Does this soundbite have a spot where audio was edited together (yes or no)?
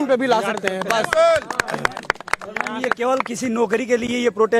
no